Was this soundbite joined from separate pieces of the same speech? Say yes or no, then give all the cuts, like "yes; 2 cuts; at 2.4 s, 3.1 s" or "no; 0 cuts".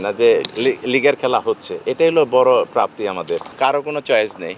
yes; 1 cut; at 3.5 s